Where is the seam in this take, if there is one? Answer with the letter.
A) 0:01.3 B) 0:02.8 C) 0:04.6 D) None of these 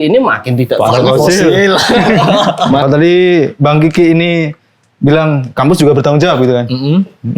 B